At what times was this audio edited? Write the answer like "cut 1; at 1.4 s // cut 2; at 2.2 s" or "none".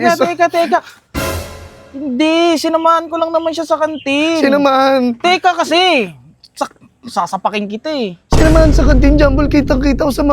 none